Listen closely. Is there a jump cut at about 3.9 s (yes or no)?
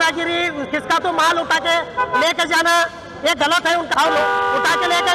yes